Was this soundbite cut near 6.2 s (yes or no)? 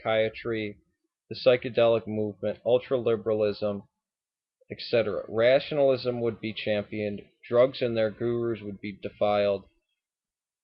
no